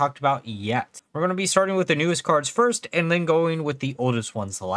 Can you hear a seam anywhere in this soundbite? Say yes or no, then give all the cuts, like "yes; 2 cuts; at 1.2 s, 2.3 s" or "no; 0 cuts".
yes; 1 cut; at 1.0 s